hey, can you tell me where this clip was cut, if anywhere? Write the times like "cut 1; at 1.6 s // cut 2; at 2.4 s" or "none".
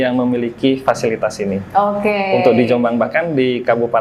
none